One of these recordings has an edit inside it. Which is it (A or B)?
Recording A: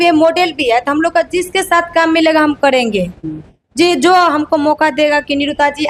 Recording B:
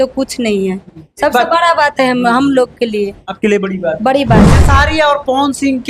B